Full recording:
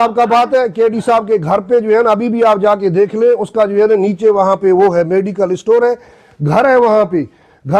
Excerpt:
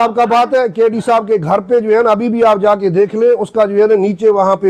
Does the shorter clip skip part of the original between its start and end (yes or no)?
no